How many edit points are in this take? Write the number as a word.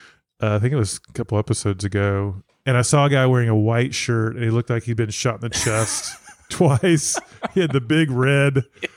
one